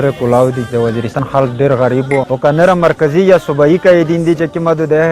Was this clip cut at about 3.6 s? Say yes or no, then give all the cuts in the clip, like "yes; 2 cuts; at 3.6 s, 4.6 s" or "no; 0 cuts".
no; 2 cuts; at 1.2 s, 2.3 s